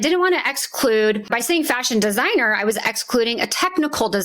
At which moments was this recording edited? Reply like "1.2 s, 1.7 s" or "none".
1.2 s